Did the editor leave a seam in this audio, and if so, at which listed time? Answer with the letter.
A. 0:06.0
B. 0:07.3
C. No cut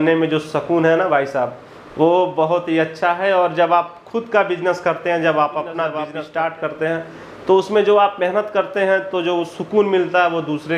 A